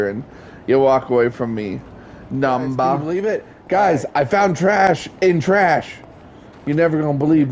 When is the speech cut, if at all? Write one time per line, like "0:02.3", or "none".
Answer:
0:03.0